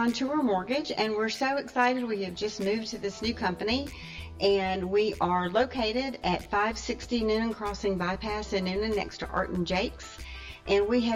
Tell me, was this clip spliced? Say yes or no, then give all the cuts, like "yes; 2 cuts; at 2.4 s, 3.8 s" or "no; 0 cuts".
no; 0 cuts